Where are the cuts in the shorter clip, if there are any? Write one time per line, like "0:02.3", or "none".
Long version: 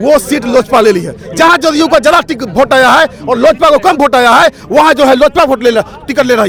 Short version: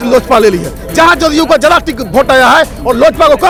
none